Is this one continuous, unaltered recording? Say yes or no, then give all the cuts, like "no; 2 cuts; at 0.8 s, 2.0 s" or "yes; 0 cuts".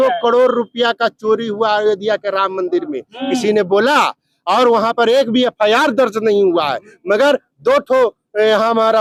yes; 0 cuts